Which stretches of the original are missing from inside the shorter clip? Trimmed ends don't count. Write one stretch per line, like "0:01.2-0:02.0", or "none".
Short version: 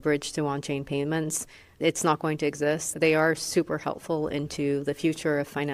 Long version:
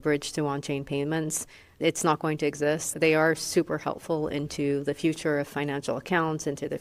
none